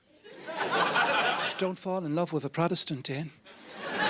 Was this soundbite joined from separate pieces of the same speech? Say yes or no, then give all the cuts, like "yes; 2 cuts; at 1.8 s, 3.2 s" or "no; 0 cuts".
yes; 1 cut; at 1.5 s